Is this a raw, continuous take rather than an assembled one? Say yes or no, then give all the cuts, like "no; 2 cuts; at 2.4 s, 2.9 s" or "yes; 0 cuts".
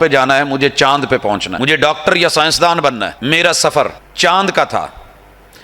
no; 3 cuts; at 1.5 s, 3.1 s, 4.0 s